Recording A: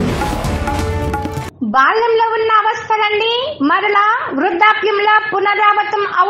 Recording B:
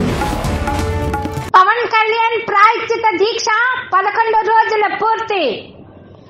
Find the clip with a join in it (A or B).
B